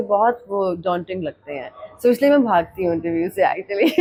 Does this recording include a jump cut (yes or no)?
no